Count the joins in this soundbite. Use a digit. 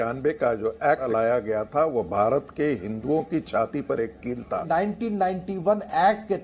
2